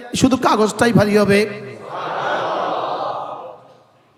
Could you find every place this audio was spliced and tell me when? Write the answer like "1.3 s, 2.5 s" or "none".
none